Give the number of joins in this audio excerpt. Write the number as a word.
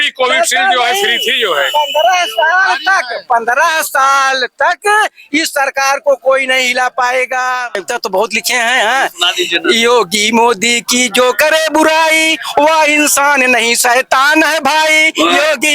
one